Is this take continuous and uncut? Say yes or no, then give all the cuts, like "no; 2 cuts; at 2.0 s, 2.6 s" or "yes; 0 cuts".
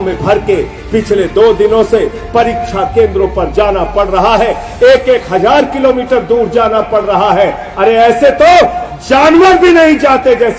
yes; 0 cuts